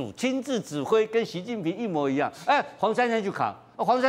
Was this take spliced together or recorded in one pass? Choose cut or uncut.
uncut